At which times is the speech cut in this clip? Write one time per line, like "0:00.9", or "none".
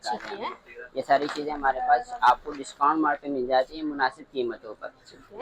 none